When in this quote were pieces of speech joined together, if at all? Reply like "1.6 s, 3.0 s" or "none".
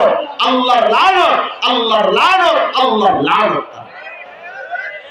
none